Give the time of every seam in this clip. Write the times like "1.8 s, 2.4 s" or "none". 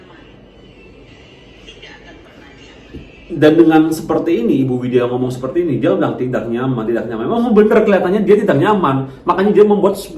none